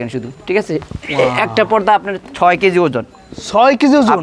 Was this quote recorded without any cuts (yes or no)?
yes